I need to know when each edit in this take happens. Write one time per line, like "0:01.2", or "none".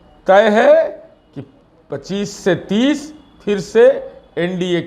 none